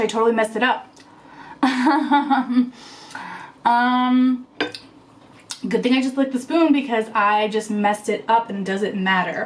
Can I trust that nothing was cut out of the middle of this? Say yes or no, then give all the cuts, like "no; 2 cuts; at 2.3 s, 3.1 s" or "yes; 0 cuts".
yes; 0 cuts